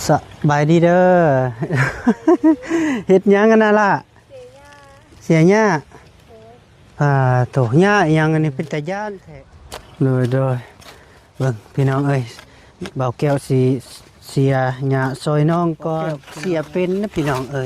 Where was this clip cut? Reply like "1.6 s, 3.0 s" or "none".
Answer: 9.2 s, 16.3 s

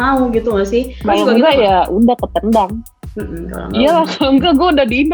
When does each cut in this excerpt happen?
0.9 s

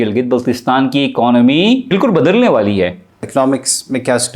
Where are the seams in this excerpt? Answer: 1.9 s, 3.3 s

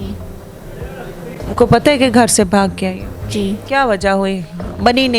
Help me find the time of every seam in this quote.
3.6 s

